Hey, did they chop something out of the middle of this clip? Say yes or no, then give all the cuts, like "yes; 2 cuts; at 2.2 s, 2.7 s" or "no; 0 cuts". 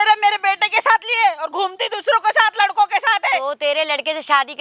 no; 0 cuts